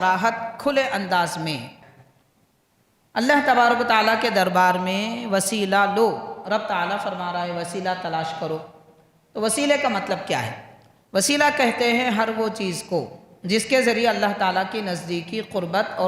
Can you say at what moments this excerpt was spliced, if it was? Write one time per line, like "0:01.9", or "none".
0:01.8